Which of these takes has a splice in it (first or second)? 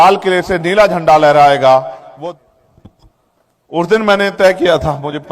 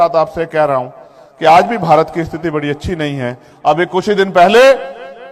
first